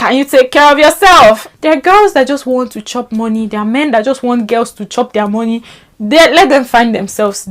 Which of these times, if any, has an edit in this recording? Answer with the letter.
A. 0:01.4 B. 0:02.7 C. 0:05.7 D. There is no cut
A